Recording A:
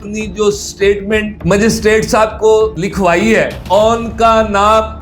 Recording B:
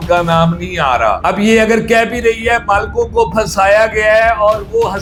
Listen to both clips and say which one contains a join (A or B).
A